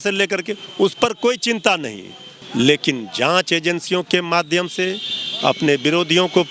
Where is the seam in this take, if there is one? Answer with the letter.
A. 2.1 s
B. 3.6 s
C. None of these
C